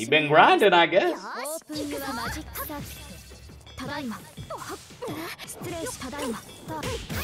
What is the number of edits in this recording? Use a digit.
0